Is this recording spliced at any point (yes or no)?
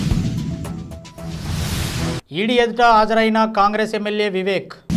no